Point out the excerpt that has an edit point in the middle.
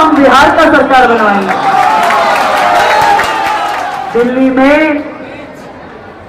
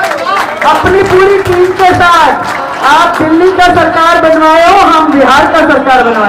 first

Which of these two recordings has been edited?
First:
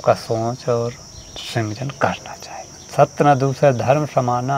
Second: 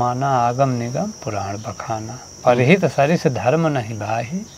first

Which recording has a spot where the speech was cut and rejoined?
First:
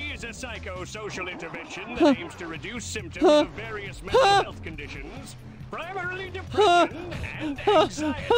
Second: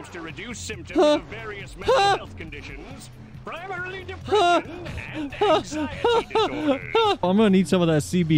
second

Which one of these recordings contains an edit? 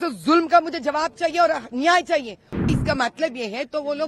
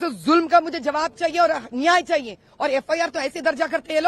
first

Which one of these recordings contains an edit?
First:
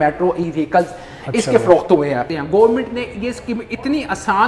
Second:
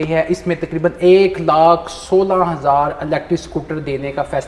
first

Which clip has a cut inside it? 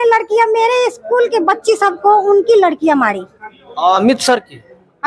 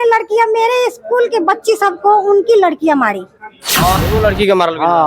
second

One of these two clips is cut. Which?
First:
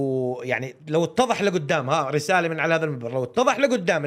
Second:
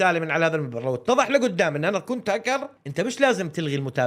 second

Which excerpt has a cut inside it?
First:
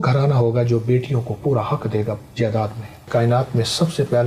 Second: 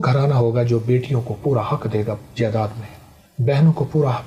first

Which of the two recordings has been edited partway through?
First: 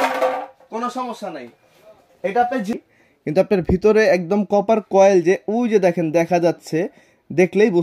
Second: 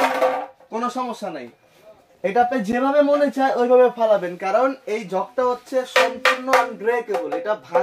first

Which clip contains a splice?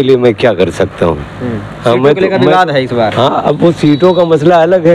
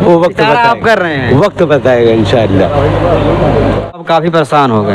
second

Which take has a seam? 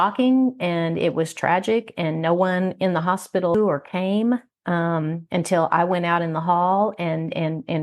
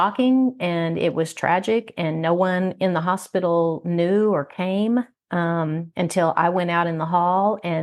first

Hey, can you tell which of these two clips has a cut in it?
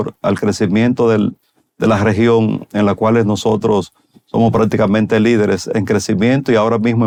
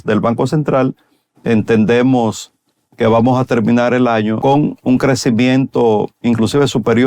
second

